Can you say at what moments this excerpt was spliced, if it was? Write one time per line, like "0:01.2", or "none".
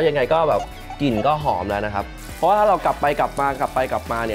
0:02.1